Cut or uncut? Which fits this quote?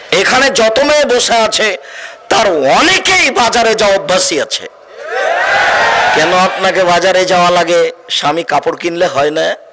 uncut